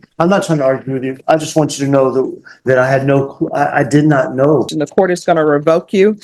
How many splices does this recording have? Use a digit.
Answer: 1